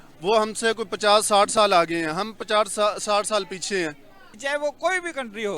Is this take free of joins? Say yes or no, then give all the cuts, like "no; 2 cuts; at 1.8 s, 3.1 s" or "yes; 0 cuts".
no; 1 cut; at 4.4 s